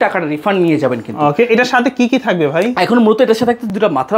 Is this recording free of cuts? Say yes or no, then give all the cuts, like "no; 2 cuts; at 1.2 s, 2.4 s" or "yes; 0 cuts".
yes; 0 cuts